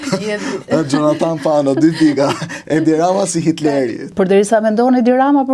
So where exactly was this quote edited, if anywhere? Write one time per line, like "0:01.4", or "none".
0:04.0